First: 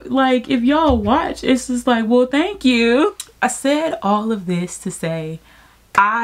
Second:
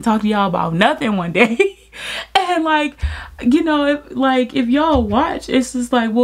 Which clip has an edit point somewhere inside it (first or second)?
first